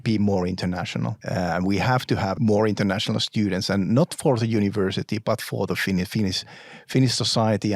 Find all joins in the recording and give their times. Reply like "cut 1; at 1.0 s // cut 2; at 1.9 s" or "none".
cut 1; at 1.2 s // cut 2; at 2.3 s